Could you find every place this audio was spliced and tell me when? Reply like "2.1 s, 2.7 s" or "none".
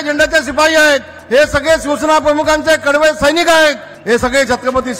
1.1 s, 3.9 s